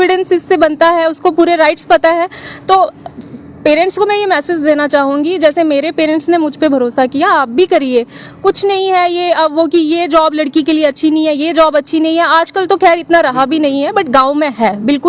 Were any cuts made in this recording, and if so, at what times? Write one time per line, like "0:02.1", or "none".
none